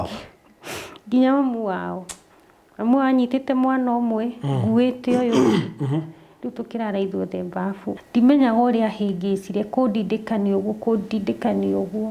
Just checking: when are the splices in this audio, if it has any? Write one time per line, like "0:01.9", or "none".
0:07.9